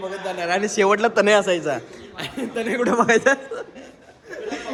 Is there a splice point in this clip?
no; 0 cuts

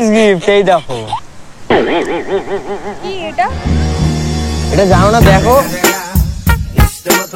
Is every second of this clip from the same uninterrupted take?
yes; 0 cuts

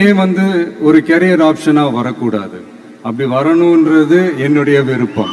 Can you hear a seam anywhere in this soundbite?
no; 0 cuts

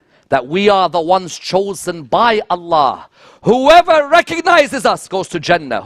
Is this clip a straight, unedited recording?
yes; 0 cuts

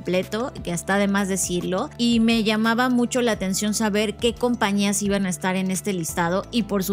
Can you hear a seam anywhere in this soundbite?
yes; 1 cut; at 1.9 s

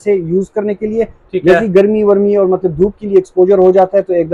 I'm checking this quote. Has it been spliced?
no; 0 cuts

